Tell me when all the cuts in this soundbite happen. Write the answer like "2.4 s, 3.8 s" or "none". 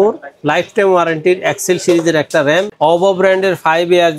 2.7 s